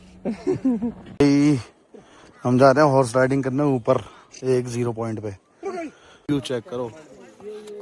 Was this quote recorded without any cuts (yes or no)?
no